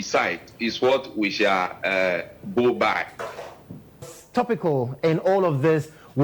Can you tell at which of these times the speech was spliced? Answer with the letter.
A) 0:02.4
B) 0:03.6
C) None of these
C